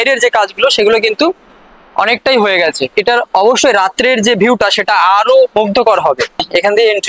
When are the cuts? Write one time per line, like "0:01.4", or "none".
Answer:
0:03.0
0:06.3

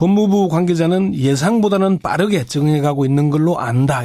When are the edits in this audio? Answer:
0:02.0

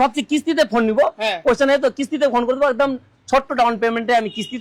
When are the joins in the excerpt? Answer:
none

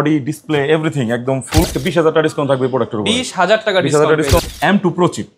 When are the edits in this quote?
0:01.7
0:04.4

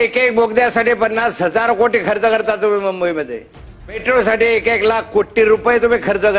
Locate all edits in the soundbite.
0:04.0

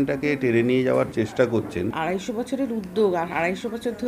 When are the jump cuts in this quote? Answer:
0:01.9

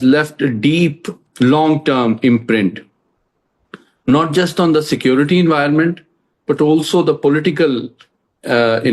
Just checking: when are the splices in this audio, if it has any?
0:01.2

